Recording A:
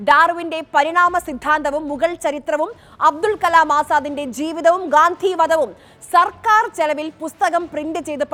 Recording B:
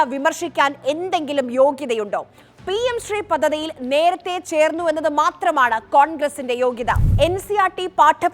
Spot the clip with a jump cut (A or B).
B